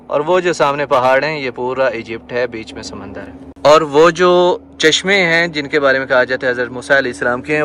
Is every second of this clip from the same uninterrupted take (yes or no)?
yes